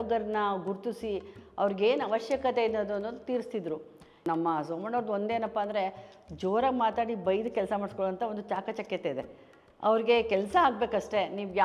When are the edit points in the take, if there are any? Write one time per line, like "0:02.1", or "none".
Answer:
0:04.2